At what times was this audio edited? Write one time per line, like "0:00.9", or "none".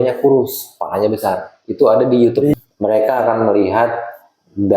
0:02.5